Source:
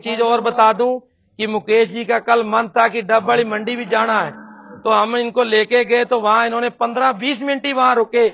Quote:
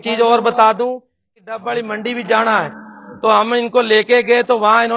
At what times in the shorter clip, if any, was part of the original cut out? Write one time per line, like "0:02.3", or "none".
0:01.4

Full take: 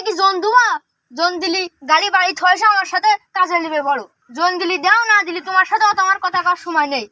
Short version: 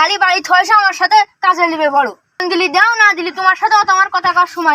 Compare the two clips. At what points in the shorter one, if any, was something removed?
0:02.4

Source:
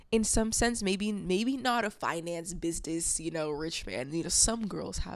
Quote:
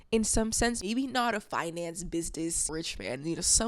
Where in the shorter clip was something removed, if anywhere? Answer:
0:00.8
0:02.7

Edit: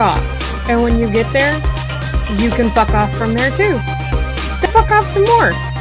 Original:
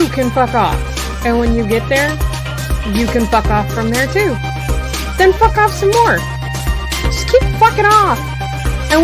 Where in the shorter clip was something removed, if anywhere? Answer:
0:04.7

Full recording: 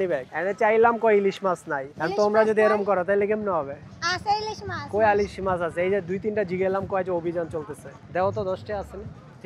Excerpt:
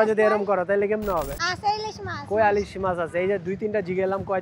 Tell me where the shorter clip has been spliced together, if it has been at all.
0:01.4

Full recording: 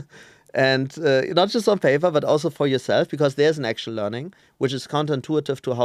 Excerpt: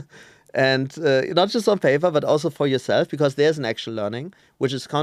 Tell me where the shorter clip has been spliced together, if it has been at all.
none

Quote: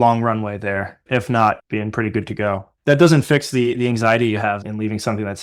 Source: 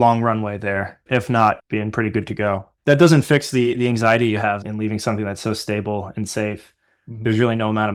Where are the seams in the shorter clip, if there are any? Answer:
none

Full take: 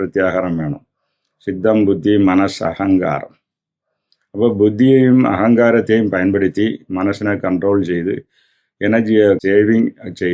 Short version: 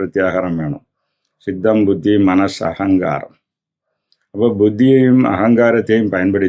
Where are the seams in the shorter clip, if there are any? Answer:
none

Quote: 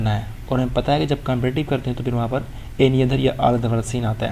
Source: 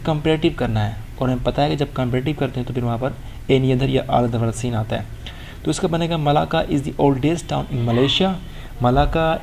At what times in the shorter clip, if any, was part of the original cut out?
none

